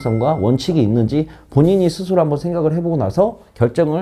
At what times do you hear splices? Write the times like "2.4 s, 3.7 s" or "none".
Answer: none